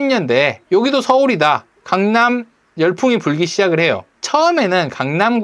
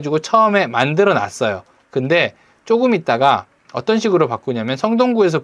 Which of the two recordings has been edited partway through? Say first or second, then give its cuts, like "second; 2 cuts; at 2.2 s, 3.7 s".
first; 2 cuts; at 1.7 s, 4.1 s